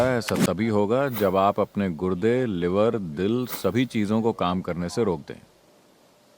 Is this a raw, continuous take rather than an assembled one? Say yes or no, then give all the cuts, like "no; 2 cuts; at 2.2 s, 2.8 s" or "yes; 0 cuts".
yes; 0 cuts